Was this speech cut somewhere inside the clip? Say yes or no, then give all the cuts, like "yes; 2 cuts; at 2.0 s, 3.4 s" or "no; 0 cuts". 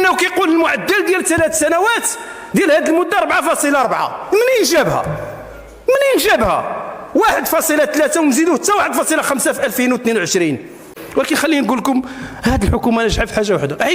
yes; 1 cut; at 11.0 s